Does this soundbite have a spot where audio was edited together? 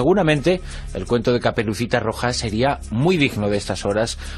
yes; 1 cut; at 2.1 s

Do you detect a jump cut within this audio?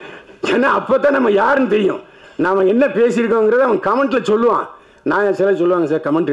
no; 0 cuts

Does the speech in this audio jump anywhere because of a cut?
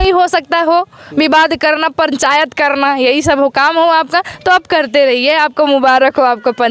no; 0 cuts

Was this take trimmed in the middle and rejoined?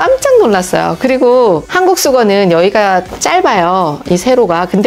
no; 0 cuts

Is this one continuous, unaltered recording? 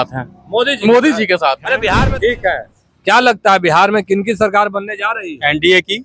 no; 1 cut; at 2.0 s

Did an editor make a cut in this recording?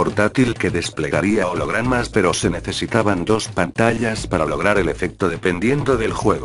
yes; 1 cut; at 4.2 s

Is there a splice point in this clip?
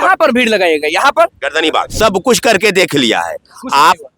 yes; 1 cut; at 1.9 s

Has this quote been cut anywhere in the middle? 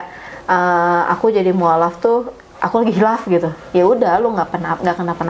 no; 0 cuts

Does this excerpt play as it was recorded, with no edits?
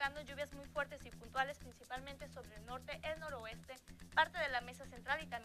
yes; 0 cuts

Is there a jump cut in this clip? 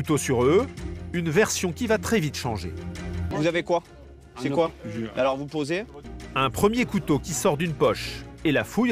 yes; 2 cuts; at 3.3 s, 6.0 s

